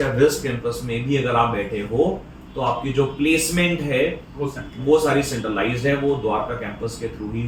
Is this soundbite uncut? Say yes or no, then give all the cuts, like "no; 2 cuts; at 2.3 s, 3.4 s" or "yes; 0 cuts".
yes; 0 cuts